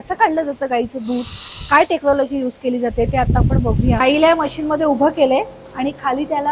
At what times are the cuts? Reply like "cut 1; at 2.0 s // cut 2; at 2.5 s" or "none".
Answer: cut 1; at 4.0 s

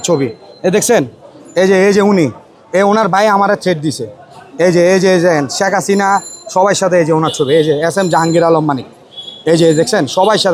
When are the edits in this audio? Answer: none

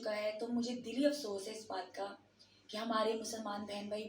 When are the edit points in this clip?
none

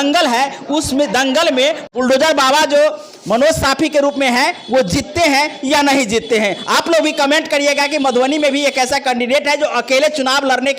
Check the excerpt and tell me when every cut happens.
cut 1; at 1.8 s

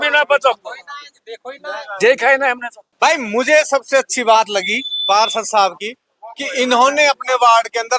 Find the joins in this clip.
cut 1; at 2.9 s

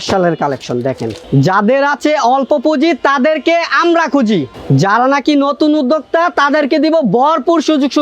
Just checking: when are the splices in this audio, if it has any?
cut 1; at 1.1 s // cut 2; at 4.5 s

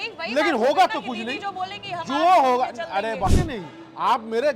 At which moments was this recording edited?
cut 1; at 3.3 s

